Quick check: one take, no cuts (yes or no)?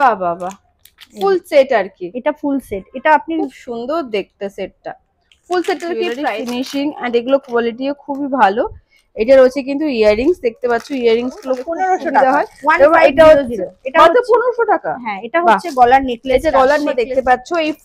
no